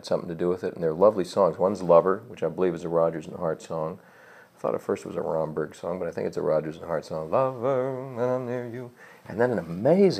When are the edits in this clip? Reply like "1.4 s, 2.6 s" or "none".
1.1 s